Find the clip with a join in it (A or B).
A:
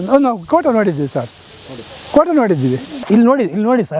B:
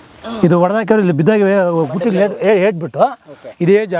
A